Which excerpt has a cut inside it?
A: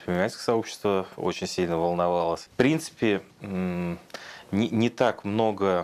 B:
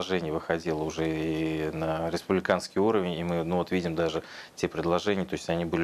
A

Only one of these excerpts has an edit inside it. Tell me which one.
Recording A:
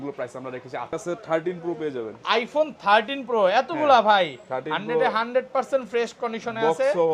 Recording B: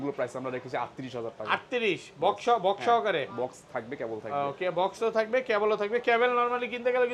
A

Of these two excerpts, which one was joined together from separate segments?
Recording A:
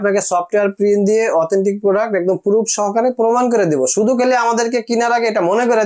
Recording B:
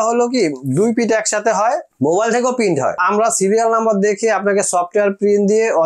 B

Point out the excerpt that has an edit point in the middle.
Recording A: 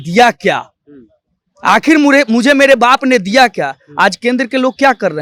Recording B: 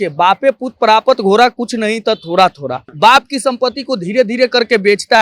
B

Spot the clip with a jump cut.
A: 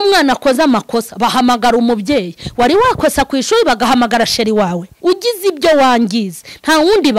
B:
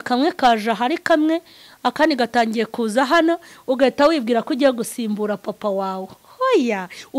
A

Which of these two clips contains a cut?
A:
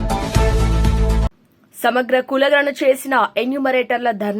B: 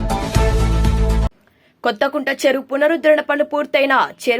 A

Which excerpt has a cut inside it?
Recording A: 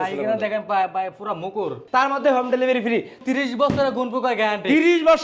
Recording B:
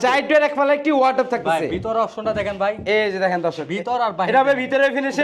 A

